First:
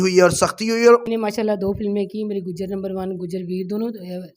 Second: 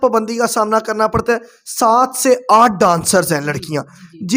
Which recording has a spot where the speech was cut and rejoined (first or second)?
first